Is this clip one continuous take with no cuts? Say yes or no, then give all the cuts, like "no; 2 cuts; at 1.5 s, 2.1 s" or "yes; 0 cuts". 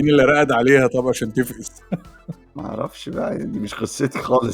no; 1 cut; at 1.7 s